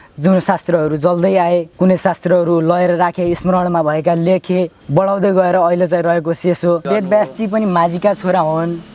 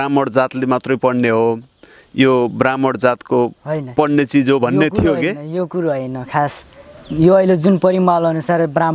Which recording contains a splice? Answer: first; 3 cuts; at 1.7 s, 4.8 s, 6.8 s

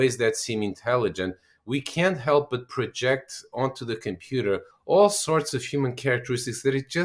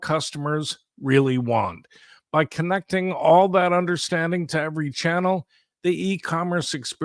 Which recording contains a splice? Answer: first; 1 cut; at 4.7 s

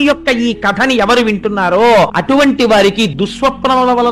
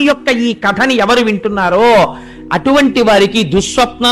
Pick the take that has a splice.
first; 2 cuts; at 2.2 s, 3.1 s

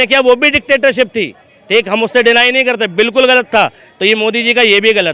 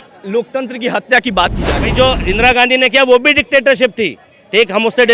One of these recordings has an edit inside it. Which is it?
second; 1 cut; at 1.9 s

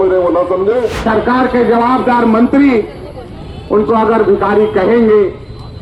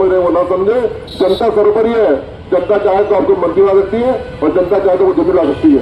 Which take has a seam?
first; 1 cut; at 1.0 s

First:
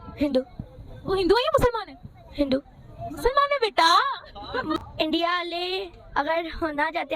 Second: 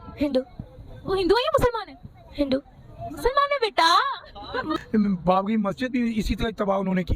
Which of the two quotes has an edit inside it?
second; 1 cut; at 4.8 s

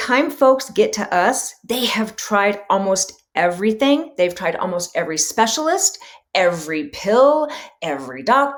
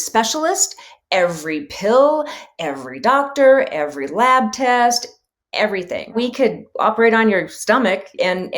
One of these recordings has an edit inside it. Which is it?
second; 1 cut; at 6.2 s

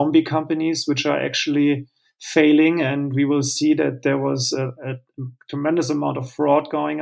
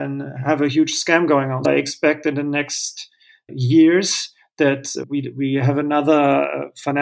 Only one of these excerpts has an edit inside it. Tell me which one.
second; 2 cuts; at 1.6 s, 5.0 s

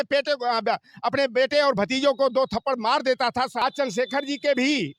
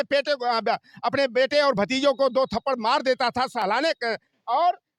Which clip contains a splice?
first; 1 cut; at 3.5 s

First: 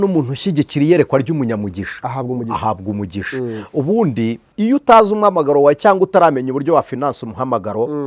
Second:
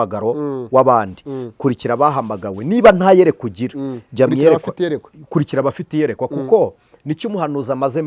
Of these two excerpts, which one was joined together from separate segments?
first; 1 cut; at 4.5 s

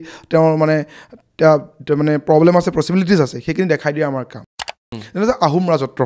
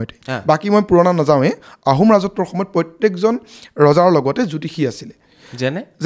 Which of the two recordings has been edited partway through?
first; 1 cut; at 4.8 s

